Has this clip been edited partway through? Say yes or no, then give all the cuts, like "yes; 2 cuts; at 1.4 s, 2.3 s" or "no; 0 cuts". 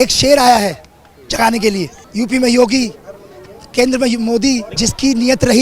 yes; 2 cuts; at 2.0 s, 4.7 s